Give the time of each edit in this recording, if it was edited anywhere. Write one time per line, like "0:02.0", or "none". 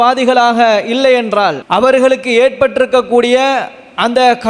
0:01.6